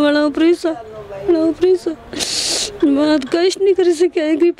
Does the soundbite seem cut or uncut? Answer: uncut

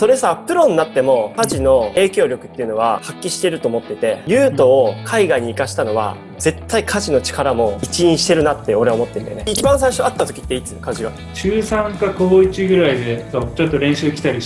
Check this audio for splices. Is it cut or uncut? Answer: cut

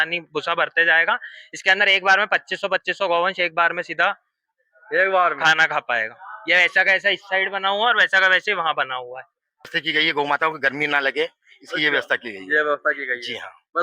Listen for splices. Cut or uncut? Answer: cut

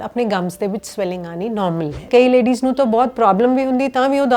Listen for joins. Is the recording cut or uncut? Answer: cut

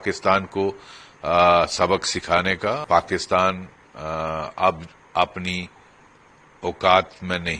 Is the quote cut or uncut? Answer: cut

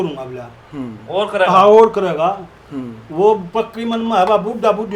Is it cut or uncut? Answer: uncut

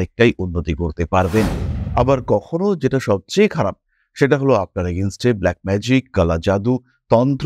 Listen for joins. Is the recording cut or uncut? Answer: cut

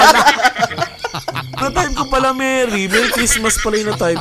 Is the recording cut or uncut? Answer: cut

